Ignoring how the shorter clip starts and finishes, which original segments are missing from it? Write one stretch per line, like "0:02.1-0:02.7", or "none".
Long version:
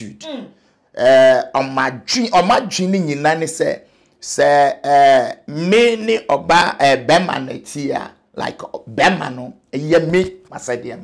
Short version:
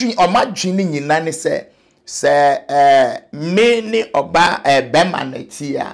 none